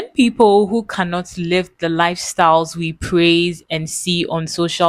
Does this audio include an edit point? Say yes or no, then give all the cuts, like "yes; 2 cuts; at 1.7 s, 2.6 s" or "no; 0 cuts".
no; 0 cuts